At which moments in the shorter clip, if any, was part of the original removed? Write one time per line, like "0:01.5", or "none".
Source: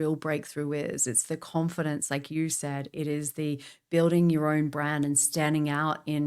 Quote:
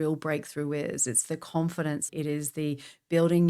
0:02.0